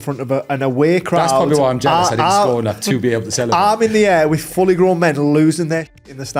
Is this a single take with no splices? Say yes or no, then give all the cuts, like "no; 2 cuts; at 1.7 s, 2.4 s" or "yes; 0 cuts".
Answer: yes; 0 cuts